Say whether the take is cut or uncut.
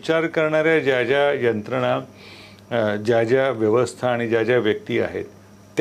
uncut